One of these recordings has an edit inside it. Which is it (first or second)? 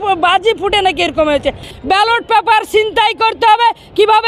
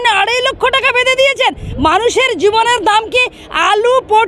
first